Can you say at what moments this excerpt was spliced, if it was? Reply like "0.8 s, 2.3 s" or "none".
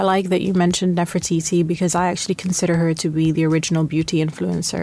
none